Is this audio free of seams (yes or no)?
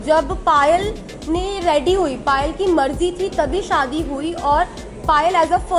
yes